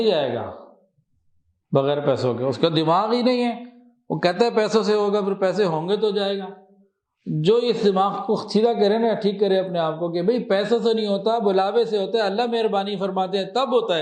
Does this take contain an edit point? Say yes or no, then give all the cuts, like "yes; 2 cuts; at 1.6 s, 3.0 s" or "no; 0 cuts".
no; 0 cuts